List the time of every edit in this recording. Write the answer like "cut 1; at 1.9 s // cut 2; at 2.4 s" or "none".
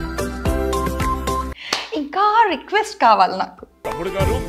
cut 1; at 1.5 s